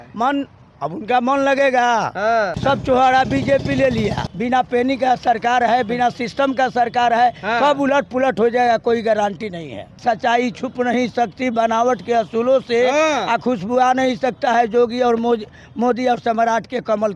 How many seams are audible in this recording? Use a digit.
3